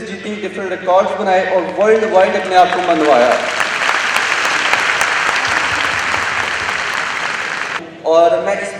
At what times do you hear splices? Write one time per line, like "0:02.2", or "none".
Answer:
0:07.8